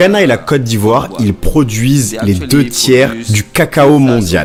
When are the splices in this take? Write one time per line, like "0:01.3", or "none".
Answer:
none